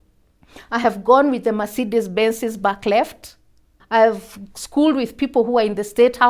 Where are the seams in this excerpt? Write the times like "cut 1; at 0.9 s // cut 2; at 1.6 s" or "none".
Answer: cut 1; at 3.7 s